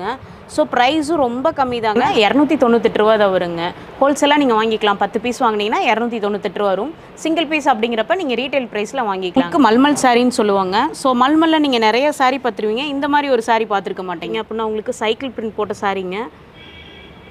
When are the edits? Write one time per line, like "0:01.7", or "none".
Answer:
0:02.1
0:09.4
0:14.3